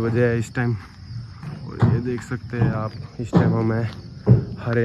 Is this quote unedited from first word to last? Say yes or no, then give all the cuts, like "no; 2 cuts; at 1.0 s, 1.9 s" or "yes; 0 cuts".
yes; 0 cuts